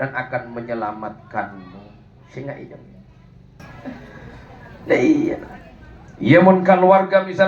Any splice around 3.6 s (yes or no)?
yes